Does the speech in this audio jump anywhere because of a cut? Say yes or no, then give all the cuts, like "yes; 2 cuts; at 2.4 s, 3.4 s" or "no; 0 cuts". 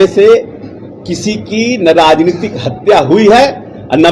no; 0 cuts